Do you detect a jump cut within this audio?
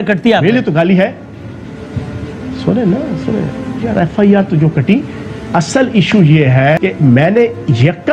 no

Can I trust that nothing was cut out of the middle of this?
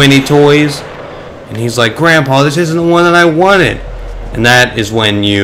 yes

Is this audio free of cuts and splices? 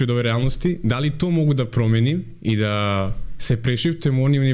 yes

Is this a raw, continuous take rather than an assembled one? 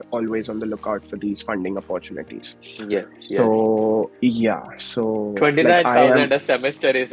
yes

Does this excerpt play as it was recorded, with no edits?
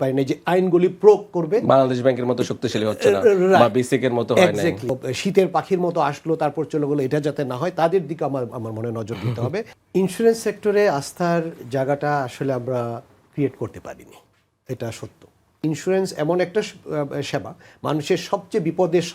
no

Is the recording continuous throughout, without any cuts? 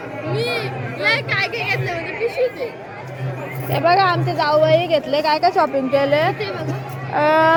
yes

